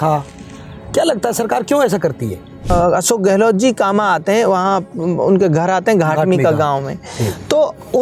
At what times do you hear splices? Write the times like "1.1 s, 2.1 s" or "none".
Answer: 2.7 s